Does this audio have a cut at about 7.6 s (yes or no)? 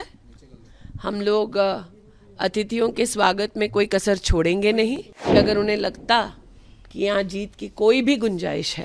no